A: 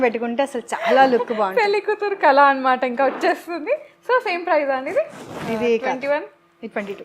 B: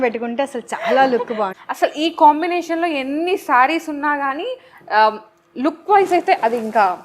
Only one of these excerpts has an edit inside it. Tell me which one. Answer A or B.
B